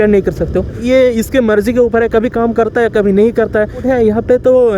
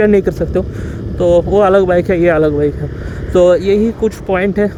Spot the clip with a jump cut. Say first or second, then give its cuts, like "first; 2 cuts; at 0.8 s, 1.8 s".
first; 2 cuts; at 0.8 s, 3.8 s